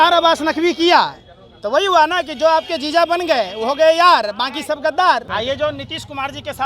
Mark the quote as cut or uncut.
cut